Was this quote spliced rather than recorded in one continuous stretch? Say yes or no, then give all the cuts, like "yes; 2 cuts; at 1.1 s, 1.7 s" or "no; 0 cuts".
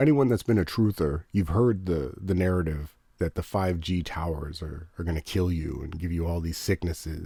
no; 0 cuts